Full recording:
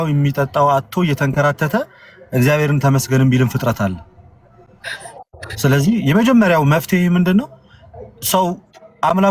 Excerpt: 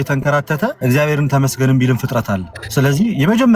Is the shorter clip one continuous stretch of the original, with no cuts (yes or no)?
no